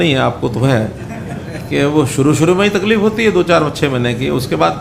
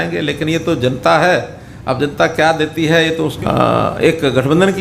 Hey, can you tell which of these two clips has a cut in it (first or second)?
second